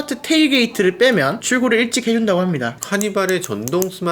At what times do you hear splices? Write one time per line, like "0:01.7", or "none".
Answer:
0:01.4
0:02.8